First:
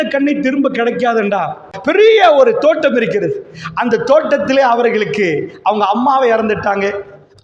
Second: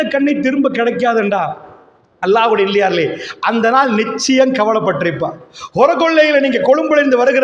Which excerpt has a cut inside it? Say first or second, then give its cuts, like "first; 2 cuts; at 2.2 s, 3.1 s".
first; 1 cut; at 1.7 s